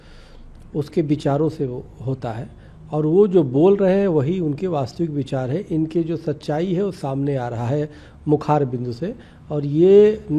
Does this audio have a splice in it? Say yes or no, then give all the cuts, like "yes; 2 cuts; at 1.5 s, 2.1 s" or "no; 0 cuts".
no; 0 cuts